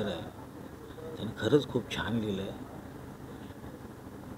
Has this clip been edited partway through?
no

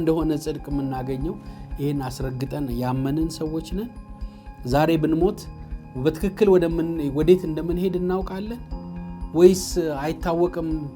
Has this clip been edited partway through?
no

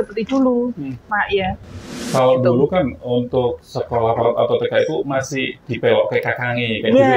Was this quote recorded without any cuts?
no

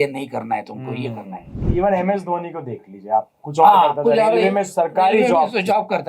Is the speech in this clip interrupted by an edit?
yes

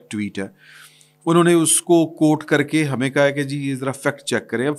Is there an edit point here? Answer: no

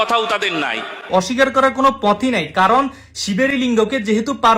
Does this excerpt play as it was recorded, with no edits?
no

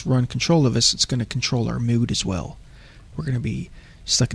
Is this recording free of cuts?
yes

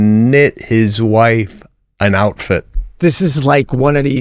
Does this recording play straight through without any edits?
no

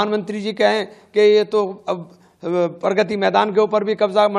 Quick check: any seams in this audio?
no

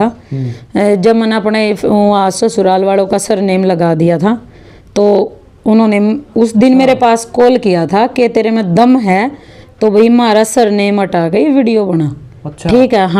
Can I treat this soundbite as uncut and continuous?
yes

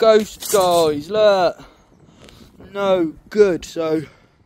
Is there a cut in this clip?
no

